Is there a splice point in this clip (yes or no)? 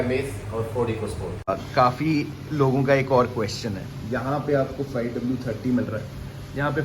yes